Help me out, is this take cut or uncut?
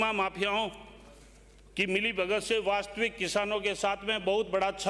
uncut